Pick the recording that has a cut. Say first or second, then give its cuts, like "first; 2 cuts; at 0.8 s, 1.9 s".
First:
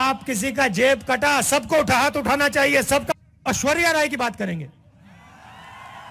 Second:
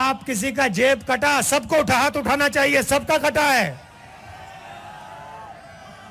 first; 1 cut; at 3.1 s